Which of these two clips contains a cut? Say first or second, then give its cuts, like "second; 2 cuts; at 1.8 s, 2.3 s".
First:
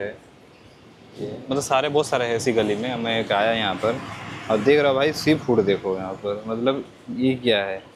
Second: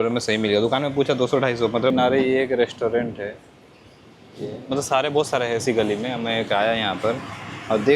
second; 1 cut; at 1.9 s